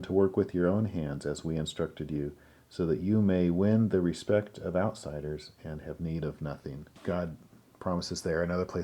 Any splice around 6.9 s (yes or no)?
yes